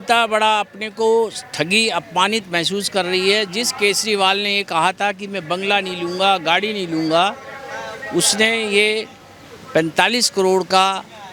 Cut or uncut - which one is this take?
uncut